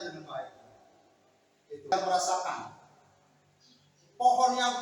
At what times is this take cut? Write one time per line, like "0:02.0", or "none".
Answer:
0:01.9